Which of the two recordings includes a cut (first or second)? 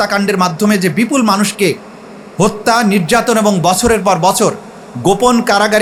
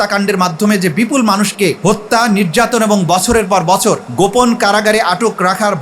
second